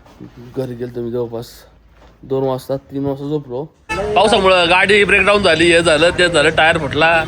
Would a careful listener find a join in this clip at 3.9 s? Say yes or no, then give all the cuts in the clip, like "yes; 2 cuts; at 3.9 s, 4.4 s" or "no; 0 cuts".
yes; 1 cut; at 3.9 s